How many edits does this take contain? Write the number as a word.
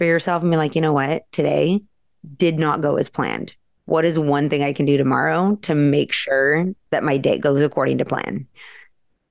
one